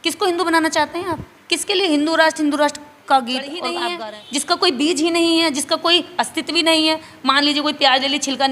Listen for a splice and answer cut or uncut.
cut